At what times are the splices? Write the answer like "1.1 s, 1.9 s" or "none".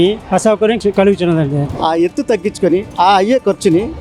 0.8 s, 1.7 s